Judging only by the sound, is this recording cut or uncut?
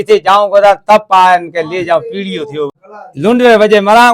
cut